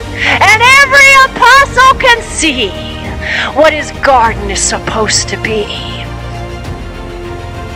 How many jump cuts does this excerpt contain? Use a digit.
1